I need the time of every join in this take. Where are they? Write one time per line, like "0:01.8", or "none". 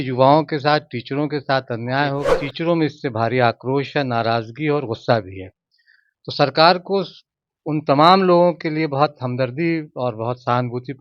0:02.5